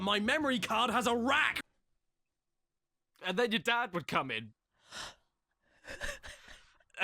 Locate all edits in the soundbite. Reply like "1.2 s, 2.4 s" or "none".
1.5 s